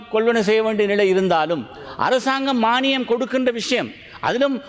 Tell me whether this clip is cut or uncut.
uncut